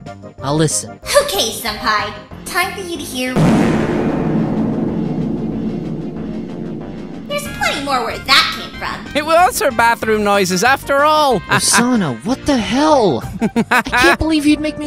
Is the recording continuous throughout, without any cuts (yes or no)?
yes